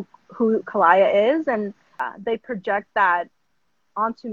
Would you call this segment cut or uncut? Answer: cut